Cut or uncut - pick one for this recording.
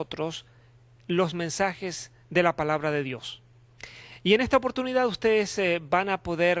uncut